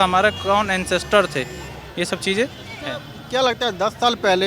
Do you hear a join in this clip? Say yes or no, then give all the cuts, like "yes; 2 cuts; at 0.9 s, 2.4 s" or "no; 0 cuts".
no; 0 cuts